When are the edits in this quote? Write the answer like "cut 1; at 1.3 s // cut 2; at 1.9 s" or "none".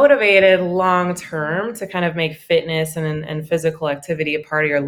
none